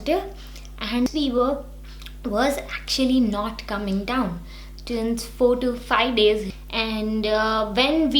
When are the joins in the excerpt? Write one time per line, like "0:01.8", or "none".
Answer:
0:01.1
0:06.6